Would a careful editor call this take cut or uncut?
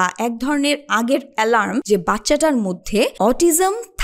cut